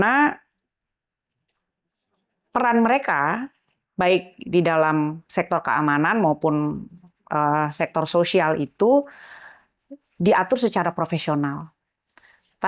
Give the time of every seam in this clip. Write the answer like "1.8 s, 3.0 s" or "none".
none